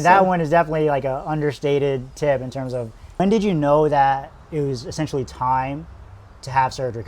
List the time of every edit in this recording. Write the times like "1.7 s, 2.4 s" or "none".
3.2 s